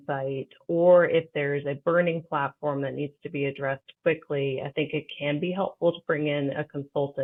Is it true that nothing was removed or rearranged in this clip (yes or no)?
yes